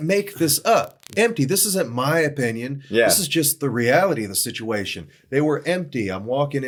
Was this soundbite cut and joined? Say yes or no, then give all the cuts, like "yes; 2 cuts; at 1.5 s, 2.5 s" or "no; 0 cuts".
no; 0 cuts